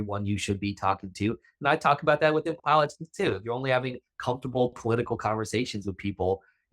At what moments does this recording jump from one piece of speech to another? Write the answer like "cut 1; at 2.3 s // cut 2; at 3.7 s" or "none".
none